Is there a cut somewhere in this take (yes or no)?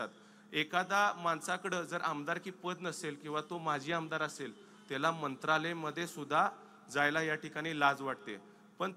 no